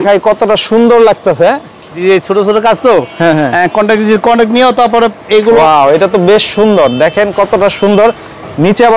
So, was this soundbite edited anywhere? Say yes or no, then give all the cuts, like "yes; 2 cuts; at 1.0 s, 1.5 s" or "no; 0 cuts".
yes; 2 cuts; at 1.9 s, 5.6 s